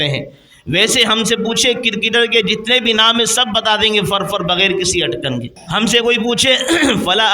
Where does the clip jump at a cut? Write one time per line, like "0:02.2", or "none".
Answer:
0:05.6